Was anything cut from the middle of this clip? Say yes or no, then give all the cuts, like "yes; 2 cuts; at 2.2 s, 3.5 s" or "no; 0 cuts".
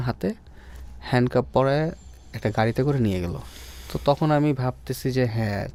no; 0 cuts